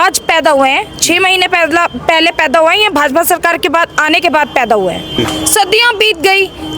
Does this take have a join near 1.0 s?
no; 1 cut; at 5.2 s

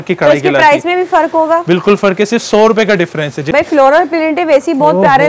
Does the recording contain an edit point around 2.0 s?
no; 1 cut; at 3.5 s

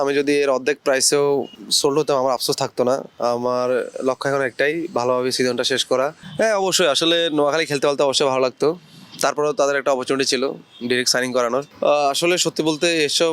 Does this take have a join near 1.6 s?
yes; 3 cuts; at 1.6 s, 6.2 s, 11.7 s

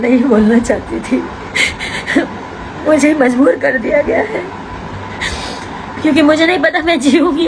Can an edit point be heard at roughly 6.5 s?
no; 0 cuts

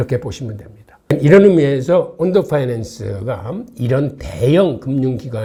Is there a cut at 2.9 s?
no; 0 cuts

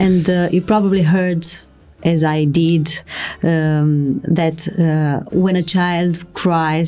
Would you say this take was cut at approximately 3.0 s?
no; 0 cuts

